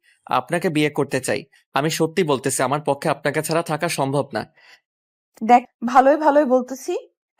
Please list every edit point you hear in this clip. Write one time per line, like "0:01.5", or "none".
0:01.5
0:05.7